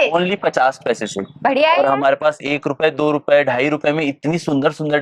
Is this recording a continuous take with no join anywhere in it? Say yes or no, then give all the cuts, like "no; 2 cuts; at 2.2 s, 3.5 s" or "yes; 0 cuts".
yes; 0 cuts